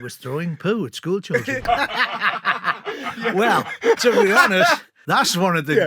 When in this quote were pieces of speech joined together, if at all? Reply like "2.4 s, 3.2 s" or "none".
1.6 s, 4.9 s